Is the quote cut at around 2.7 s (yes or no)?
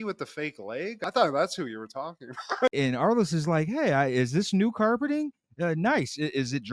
yes